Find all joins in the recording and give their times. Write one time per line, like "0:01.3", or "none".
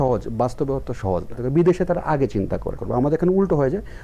0:01.4
0:02.8